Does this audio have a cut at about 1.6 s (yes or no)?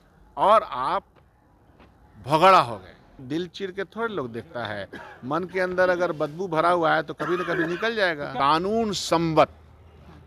no